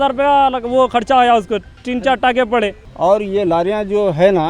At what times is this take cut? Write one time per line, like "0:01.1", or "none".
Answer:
0:02.8